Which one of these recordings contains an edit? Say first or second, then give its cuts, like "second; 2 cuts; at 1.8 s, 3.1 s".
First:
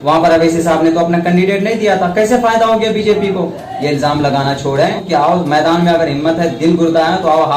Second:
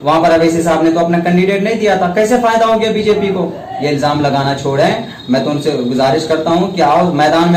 first; 1 cut; at 5.0 s